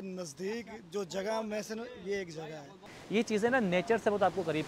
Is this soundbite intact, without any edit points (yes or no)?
no